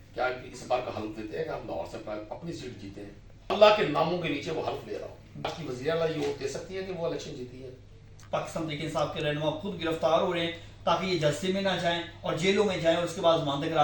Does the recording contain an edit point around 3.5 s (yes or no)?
yes